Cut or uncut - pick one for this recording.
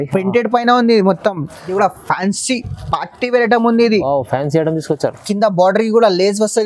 cut